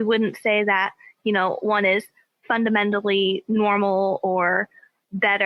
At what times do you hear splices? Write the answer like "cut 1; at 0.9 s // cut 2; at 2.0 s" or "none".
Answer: none